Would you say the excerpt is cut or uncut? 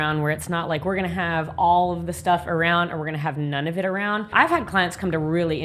cut